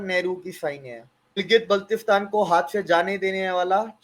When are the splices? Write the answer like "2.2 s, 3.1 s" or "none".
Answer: 1.4 s